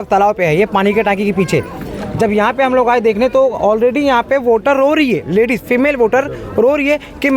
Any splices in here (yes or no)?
no